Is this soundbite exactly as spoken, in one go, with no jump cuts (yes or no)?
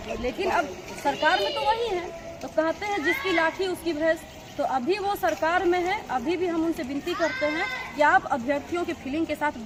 yes